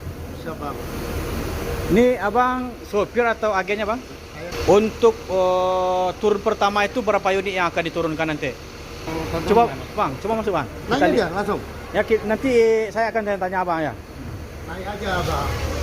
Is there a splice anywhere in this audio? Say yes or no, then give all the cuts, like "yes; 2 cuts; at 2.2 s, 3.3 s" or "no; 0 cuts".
yes; 2 cuts; at 4.4 s, 9.1 s